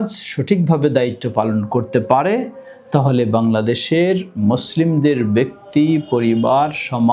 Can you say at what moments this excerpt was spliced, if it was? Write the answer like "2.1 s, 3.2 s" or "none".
none